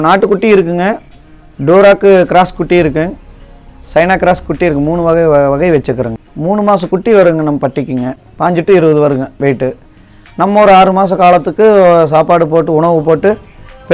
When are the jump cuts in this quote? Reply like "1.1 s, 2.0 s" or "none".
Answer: 6.1 s, 8.2 s